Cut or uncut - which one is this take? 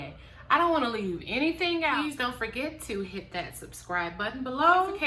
uncut